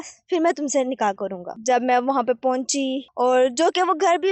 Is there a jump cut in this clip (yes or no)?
yes